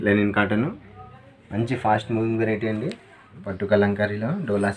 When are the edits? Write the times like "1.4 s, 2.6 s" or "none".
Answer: 3.4 s